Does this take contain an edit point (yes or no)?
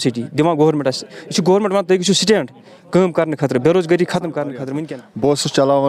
yes